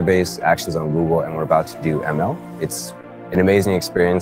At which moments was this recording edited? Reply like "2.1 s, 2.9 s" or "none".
2.7 s